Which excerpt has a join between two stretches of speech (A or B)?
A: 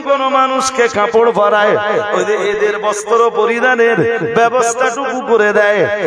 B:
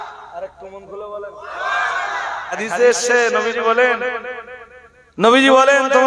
B